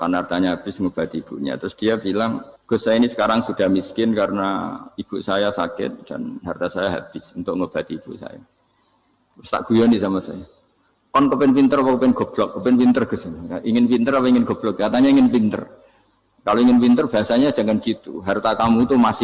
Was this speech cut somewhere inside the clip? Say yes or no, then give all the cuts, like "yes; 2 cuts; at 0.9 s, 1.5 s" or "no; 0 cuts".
yes; 1 cut; at 2.5 s